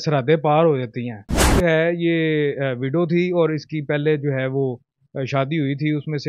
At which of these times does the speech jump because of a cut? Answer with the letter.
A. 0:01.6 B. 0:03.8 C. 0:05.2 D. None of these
A